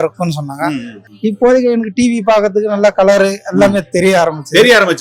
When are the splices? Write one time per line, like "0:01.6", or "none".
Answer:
0:01.0